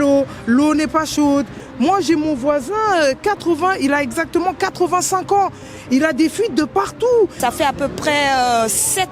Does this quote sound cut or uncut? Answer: cut